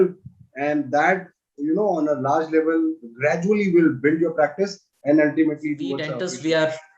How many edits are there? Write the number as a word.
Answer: one